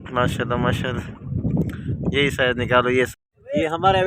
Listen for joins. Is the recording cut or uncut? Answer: cut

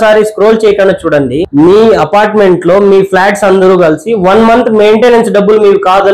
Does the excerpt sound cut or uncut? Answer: cut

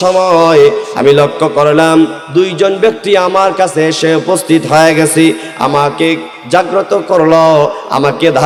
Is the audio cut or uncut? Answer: uncut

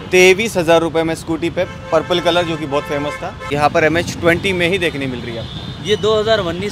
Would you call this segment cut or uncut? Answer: cut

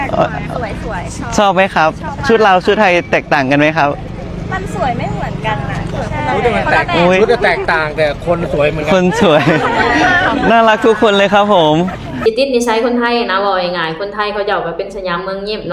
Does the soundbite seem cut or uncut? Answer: cut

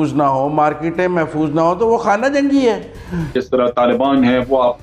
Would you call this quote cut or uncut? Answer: cut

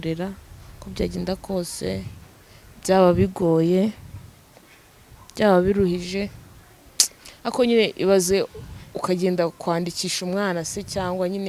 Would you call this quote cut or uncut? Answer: uncut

